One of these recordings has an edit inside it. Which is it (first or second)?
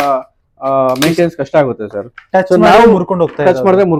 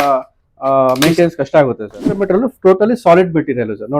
second